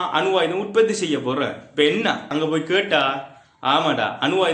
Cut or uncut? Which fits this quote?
cut